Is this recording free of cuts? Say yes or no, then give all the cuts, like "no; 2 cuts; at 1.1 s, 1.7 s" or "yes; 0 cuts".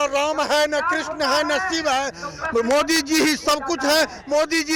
yes; 0 cuts